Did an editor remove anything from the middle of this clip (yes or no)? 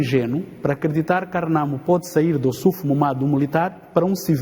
no